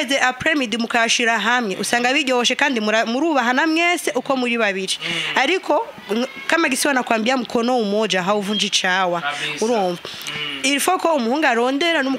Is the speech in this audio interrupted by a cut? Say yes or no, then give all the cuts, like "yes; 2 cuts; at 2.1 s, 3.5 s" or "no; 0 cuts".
no; 0 cuts